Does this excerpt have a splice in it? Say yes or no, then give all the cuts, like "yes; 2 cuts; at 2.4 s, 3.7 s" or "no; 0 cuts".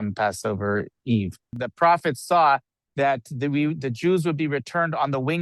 yes; 1 cut; at 1.5 s